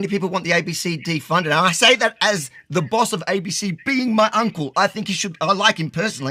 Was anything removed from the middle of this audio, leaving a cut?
no; 0 cuts

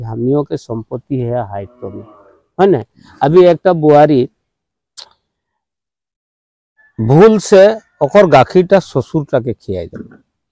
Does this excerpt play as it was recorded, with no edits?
yes; 0 cuts

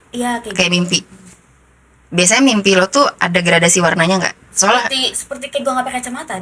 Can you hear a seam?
no; 0 cuts

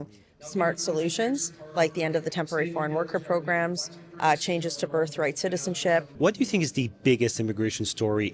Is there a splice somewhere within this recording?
yes; 1 cut; at 6.1 s

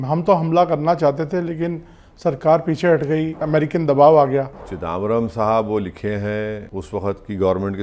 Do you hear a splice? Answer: yes; 3 cuts; at 3.4 s, 4.7 s, 6.7 s

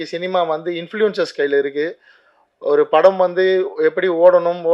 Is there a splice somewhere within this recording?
no; 0 cuts

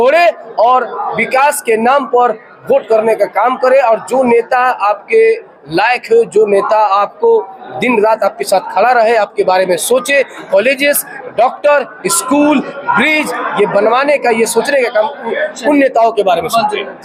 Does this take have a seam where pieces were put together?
no; 0 cuts

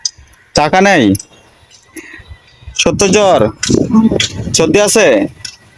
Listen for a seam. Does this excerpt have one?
no; 0 cuts

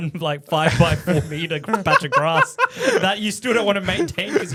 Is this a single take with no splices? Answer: yes; 0 cuts

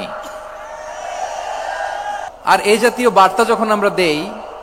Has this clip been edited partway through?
yes; 1 cut; at 2.3 s

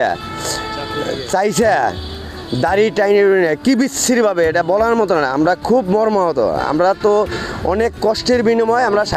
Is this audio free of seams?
yes; 0 cuts

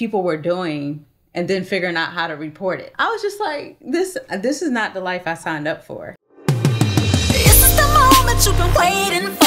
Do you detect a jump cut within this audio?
yes; 2 cuts; at 2.9 s, 6.0 s

